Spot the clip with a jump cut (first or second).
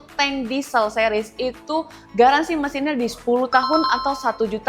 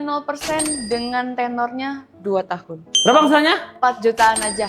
second